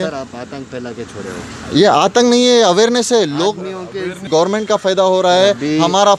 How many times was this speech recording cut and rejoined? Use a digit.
1